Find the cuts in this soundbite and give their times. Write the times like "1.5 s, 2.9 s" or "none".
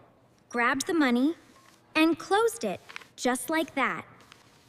none